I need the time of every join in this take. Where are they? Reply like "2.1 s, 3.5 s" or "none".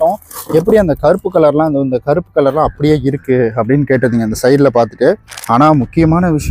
5.3 s